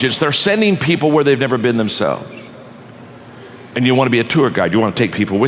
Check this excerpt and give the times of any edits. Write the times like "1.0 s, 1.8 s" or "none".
none